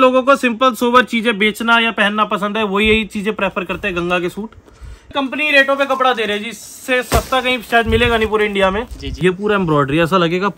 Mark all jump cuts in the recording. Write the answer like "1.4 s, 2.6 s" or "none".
5.1 s, 9.0 s